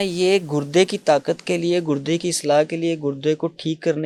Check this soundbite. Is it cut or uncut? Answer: uncut